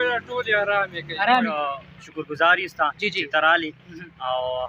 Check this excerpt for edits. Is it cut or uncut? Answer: cut